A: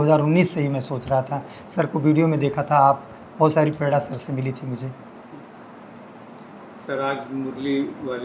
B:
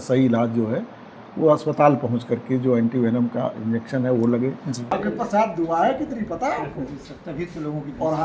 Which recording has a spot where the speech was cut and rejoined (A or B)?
B